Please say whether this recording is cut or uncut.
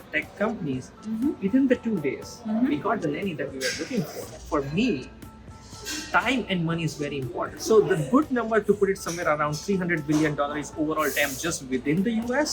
cut